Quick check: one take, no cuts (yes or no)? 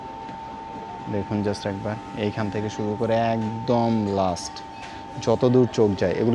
yes